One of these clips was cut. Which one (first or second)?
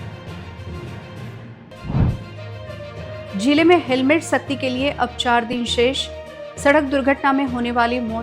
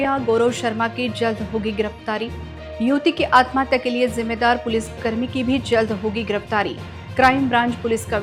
first